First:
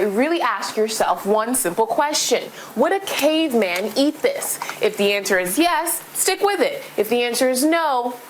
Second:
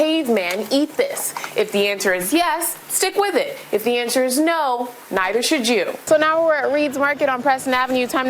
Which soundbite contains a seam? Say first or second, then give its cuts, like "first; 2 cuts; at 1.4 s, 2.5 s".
second; 1 cut; at 6.0 s